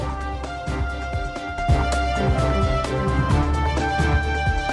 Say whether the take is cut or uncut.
cut